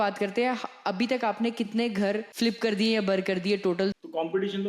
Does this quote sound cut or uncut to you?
cut